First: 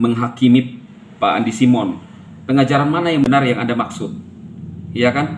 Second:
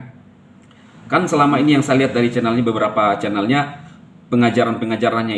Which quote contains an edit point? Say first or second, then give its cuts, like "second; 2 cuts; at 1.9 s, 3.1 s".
first; 1 cut; at 3.3 s